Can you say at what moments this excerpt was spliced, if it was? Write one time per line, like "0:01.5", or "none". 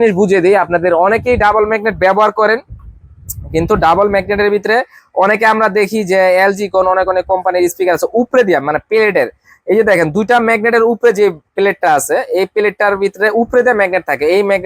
none